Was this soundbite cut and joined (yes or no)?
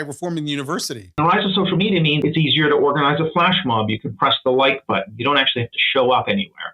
yes